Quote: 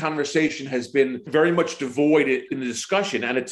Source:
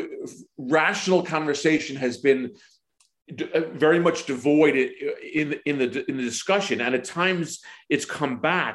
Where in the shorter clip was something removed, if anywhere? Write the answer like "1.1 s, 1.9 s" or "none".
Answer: 1.2 s, 2.5 s